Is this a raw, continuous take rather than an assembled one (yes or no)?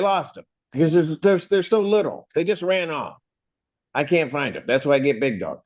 yes